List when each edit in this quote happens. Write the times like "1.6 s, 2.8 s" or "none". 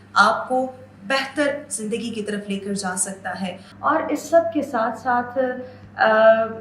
3.7 s